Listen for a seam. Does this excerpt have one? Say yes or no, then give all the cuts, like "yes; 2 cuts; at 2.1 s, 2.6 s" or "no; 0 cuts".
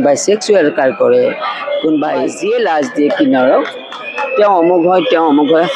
yes; 1 cut; at 2.3 s